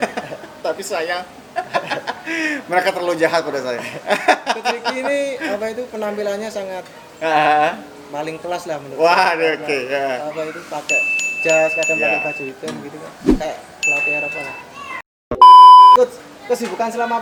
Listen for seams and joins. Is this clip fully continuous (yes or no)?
yes